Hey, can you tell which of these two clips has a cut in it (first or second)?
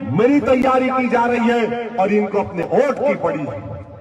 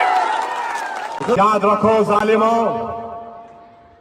second